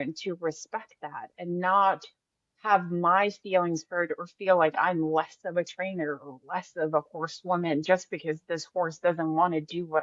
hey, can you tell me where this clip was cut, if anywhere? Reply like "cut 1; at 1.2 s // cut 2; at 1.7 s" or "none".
none